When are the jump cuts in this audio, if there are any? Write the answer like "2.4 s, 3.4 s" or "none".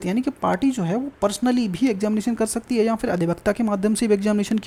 none